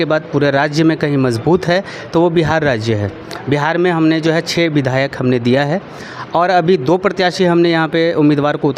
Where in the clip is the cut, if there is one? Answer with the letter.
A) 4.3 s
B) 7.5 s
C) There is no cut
C